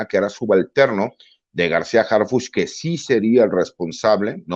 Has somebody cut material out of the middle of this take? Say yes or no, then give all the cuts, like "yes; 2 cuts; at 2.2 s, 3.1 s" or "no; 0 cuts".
no; 0 cuts